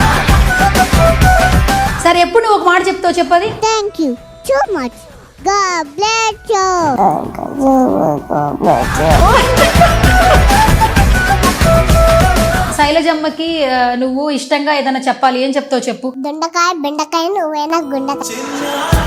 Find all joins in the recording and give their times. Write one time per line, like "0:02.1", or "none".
0:01.9
0:12.7